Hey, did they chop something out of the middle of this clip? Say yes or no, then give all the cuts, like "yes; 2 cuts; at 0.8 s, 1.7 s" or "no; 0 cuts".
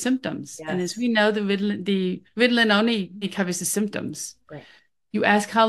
yes; 2 cuts; at 2.2 s, 3.3 s